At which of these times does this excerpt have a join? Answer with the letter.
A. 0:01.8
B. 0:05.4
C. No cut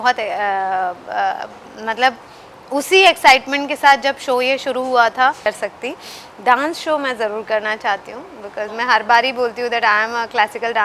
B